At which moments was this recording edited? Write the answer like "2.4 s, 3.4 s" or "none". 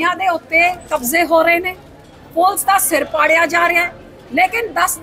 none